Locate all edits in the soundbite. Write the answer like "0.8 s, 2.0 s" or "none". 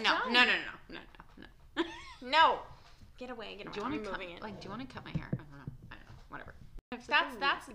6.8 s